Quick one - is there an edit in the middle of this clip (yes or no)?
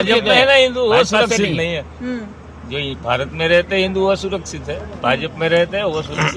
no